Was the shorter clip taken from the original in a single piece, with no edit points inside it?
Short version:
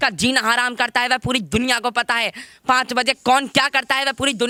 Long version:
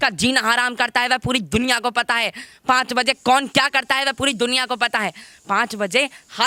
yes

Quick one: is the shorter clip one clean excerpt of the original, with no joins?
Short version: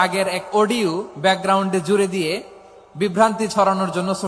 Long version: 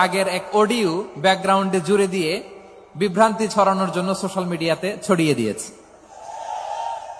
yes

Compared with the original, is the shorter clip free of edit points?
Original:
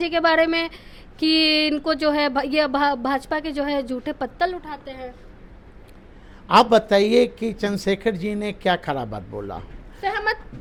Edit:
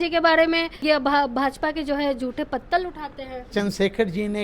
no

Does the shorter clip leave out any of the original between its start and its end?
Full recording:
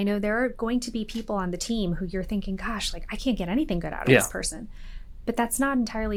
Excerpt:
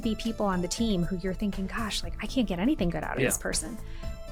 no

